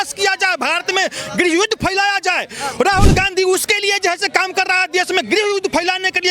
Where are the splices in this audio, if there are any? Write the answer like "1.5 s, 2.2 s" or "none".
none